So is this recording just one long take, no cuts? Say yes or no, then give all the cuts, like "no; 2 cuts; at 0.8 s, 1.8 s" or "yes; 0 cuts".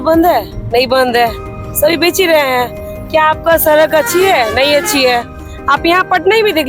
yes; 0 cuts